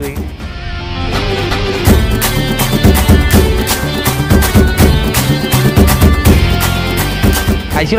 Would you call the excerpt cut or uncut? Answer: uncut